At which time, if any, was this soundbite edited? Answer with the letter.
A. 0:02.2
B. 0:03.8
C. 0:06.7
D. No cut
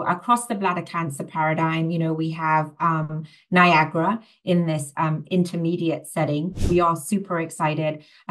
C